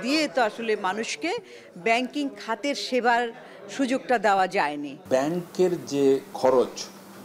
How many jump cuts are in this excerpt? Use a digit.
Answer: 2